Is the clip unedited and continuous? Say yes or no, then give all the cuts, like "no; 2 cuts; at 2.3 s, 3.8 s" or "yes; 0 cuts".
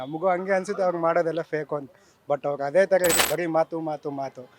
no; 1 cut; at 3.2 s